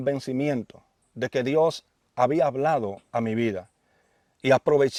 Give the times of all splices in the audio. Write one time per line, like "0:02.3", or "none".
none